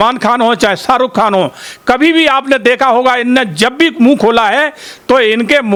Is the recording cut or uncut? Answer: uncut